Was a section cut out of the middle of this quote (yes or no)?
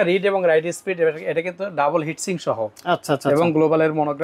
no